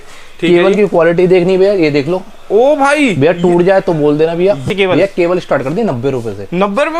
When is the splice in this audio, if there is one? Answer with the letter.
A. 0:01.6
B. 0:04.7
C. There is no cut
B